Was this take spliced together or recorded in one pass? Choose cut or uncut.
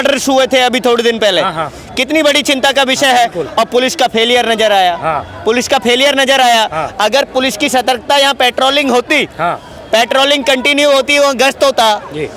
uncut